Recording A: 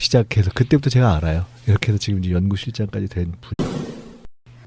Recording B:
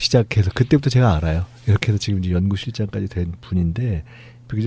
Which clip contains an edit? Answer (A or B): B